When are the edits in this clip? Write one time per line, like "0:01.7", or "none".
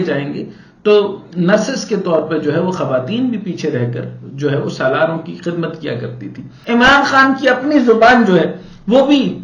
0:06.6